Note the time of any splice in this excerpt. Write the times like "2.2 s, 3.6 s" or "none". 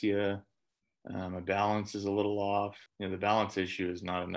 2.8 s

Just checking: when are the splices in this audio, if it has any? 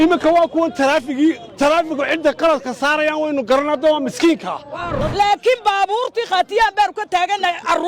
4.9 s

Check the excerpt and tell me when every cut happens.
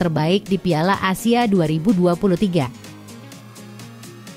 2.7 s

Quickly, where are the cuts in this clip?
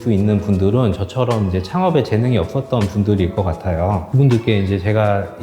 4.1 s

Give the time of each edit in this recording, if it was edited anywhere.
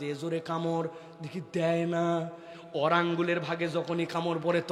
none

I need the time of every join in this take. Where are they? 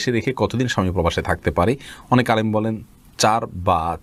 none

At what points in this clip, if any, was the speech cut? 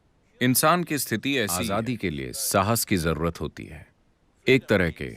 1.6 s

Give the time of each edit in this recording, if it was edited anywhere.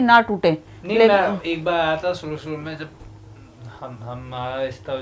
none

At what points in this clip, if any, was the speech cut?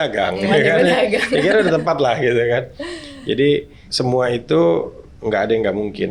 3.8 s

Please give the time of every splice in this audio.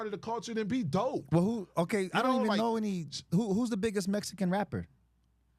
none

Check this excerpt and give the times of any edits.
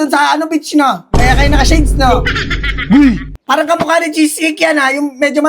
3.3 s

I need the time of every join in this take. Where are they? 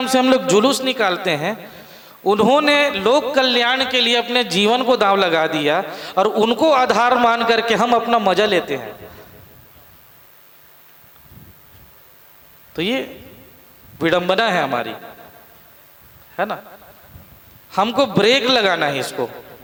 none

